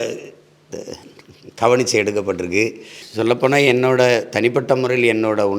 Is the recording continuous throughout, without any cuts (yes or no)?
no